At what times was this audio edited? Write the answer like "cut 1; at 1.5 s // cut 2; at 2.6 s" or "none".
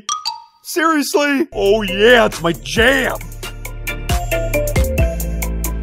cut 1; at 1.5 s